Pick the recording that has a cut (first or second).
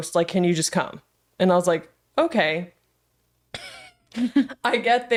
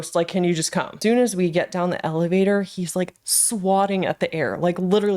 second